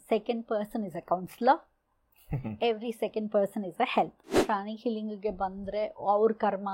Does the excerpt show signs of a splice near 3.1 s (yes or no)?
no